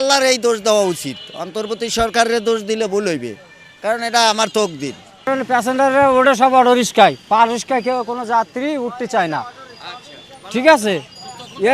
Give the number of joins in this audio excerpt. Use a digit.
1